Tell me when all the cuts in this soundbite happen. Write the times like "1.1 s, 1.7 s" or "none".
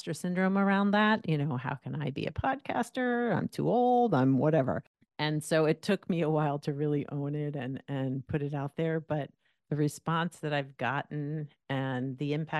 none